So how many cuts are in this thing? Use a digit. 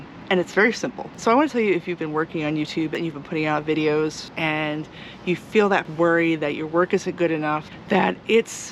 5